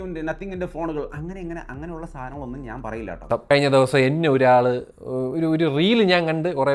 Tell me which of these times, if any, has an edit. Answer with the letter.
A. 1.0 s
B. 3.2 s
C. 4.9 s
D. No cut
B